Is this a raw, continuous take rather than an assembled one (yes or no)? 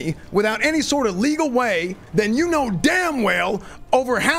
yes